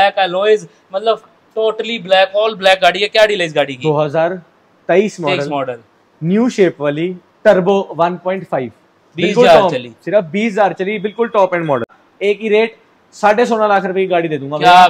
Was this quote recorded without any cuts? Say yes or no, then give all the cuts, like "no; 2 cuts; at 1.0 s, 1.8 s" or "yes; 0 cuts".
no; 1 cut; at 11.9 s